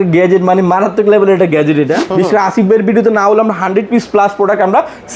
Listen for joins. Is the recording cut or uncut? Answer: cut